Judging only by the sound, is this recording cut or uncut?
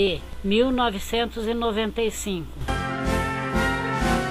cut